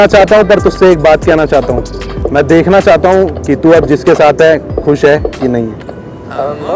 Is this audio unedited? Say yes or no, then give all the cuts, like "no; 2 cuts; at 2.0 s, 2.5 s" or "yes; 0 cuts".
yes; 0 cuts